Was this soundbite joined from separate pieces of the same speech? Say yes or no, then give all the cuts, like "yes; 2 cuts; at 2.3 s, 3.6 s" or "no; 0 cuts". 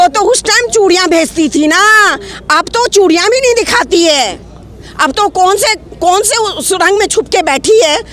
no; 0 cuts